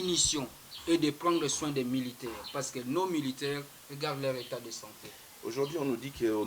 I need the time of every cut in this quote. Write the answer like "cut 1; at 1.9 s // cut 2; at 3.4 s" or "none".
none